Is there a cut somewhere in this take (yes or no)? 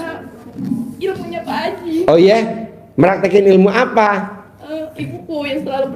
no